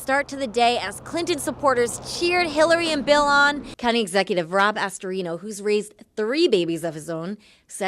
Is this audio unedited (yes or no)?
no